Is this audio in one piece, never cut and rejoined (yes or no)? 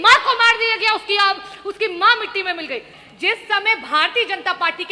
no